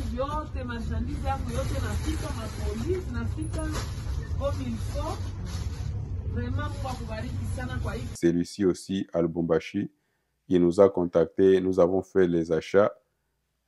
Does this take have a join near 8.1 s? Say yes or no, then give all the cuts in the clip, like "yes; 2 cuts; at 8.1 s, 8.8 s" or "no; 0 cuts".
yes; 1 cut; at 8.1 s